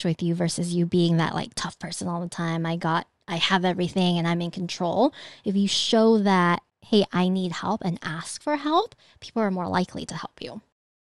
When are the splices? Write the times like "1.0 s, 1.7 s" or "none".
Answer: 6.7 s